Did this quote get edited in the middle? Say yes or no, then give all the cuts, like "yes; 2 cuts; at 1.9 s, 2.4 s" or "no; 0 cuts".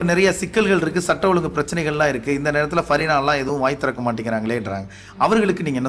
no; 0 cuts